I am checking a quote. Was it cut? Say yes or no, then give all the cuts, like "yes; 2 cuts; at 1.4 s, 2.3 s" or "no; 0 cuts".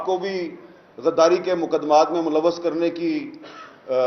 no; 0 cuts